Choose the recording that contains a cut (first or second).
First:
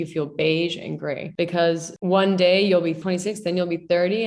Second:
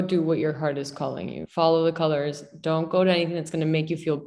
first